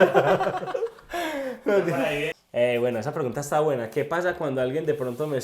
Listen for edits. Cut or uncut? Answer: cut